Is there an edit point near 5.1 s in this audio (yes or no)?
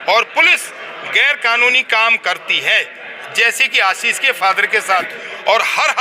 yes